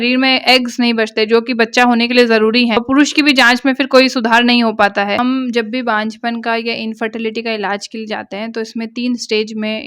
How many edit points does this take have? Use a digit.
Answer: 1